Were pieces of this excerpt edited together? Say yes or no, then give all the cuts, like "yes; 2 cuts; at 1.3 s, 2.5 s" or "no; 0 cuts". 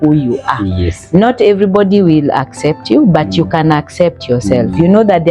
no; 0 cuts